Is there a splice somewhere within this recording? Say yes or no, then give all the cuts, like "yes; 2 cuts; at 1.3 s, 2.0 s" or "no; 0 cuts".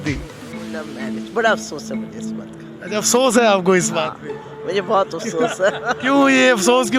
no; 0 cuts